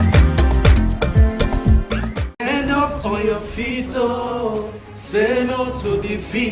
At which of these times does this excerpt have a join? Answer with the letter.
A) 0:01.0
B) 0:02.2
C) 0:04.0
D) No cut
B